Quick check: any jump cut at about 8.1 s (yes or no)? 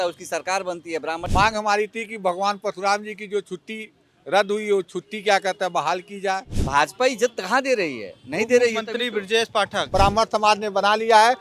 no